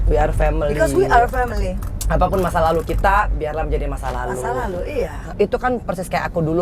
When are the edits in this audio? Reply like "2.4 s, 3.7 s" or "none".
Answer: 5.3 s